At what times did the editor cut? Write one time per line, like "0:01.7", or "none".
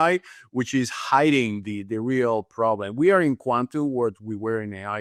none